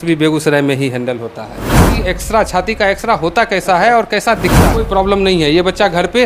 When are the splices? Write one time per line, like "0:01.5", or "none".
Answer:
0:01.9
0:04.6